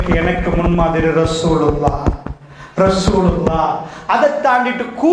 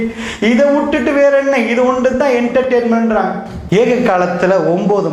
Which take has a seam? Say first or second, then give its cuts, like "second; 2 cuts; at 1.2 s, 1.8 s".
second; 1 cut; at 3.5 s